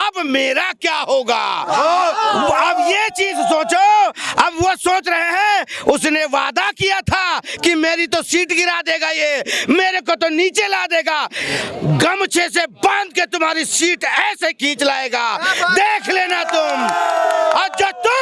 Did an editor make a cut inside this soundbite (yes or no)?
no